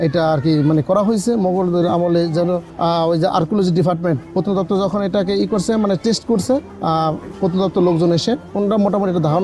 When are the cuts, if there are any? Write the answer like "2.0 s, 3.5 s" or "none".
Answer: none